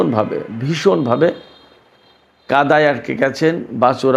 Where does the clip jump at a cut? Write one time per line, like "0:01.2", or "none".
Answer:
none